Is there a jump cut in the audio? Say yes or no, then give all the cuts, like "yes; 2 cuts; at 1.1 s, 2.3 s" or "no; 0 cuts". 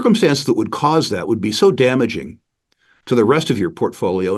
no; 0 cuts